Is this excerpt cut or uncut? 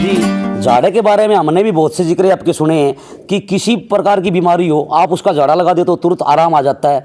uncut